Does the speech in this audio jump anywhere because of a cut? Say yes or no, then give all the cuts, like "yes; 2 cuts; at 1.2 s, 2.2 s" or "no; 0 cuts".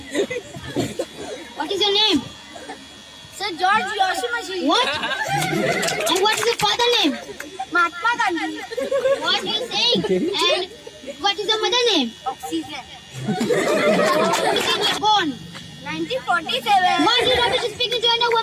yes; 1 cut; at 14.8 s